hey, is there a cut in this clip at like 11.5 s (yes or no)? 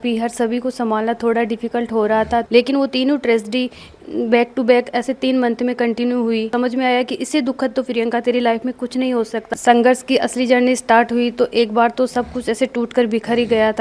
no